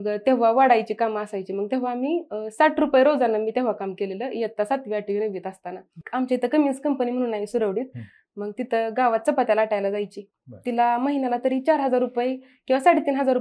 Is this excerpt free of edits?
no; 1 cut; at 6.0 s

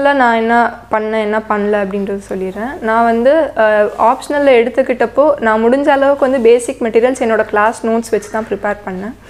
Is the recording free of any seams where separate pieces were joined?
yes; 0 cuts

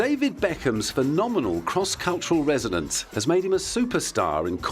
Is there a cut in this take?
yes; 1 cut; at 2.7 s

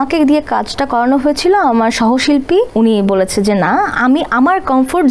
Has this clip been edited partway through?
yes; 1 cut; at 2.7 s

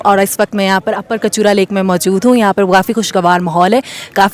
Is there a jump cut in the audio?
no; 0 cuts

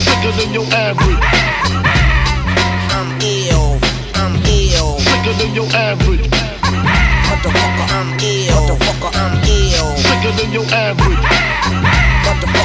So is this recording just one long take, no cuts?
yes; 0 cuts

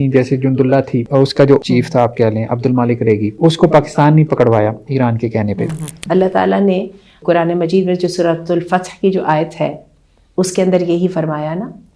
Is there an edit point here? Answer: yes; 4 cuts; at 1.3 s, 3.3 s, 5.9 s, 7.1 s

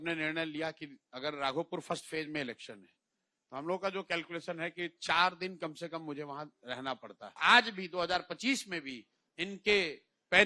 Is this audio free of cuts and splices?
no; 1 cut; at 7.4 s

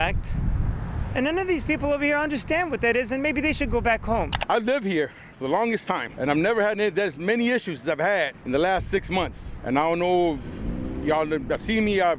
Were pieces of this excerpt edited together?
yes; 4 cuts; at 4.3 s, 6.1 s, 8.4 s, 9.5 s

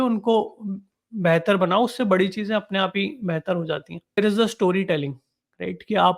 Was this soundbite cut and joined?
yes; 1 cut; at 4.2 s

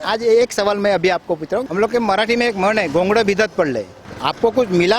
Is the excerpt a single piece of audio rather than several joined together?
no; 2 cuts; at 1.6 s, 4.1 s

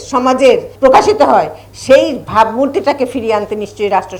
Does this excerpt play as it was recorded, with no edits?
yes; 0 cuts

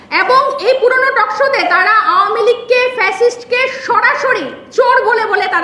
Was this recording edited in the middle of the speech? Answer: no; 0 cuts

